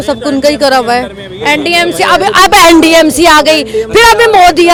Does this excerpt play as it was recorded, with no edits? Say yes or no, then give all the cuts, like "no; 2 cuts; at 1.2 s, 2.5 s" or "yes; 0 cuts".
yes; 0 cuts